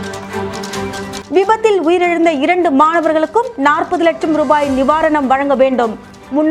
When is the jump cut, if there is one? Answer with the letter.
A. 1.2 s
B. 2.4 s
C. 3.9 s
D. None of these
A